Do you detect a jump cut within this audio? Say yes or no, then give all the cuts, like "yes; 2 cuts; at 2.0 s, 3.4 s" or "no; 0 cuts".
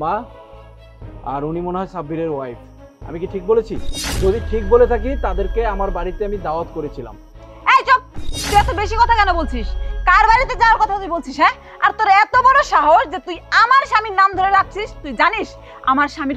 yes; 1 cut; at 4.0 s